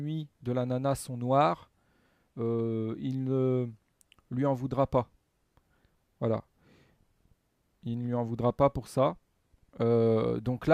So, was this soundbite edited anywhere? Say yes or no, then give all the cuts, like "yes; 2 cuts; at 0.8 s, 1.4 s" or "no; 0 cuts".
no; 0 cuts